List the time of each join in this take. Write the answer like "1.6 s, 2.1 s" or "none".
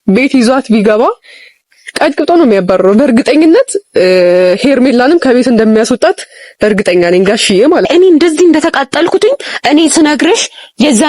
7.9 s